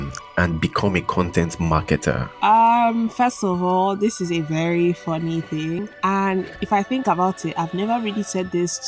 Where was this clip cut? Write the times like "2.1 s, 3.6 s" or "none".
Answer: 2.3 s, 6.6 s

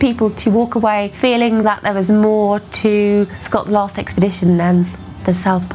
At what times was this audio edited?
1.1 s, 3.4 s

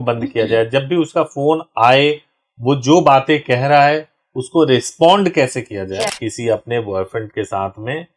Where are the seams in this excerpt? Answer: 6.1 s

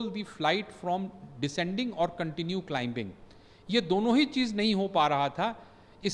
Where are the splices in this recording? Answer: none

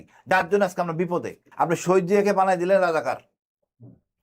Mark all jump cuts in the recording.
1.4 s

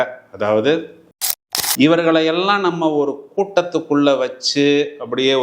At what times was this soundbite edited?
1.1 s

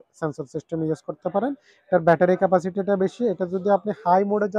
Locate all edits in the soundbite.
none

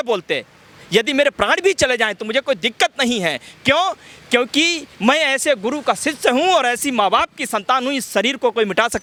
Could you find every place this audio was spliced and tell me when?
none

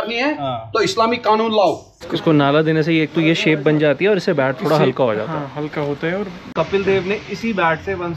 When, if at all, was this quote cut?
1.9 s, 6.5 s

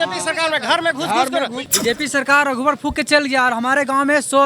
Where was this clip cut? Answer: 1.6 s

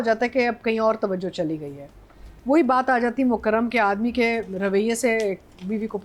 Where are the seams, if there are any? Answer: none

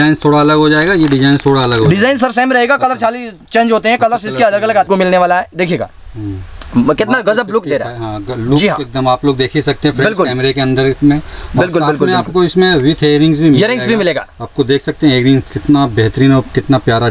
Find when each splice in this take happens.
4.9 s

